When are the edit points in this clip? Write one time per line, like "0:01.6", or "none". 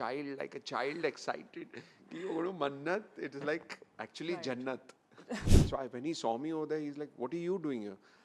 0:05.4